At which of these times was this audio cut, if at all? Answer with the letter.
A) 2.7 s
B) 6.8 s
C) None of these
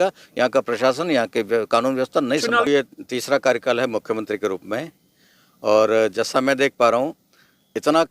A